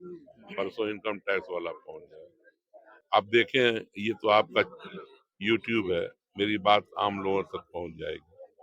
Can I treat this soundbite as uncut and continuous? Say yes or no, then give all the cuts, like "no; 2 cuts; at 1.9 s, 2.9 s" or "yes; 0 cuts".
no; 1 cut; at 3.0 s